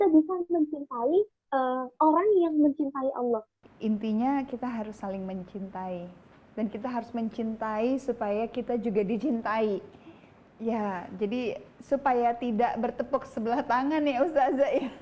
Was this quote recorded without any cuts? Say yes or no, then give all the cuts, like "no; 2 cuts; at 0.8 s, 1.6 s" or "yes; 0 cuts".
no; 1 cut; at 3.6 s